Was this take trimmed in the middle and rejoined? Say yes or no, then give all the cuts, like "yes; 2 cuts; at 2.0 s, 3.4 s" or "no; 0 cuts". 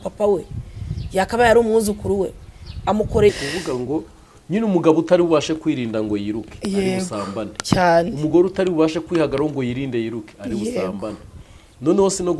yes; 1 cut; at 3.3 s